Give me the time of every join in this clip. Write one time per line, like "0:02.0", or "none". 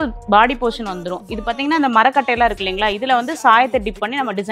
none